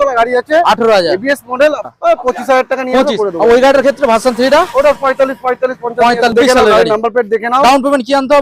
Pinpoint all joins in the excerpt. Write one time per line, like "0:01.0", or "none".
0:01.8
0:06.3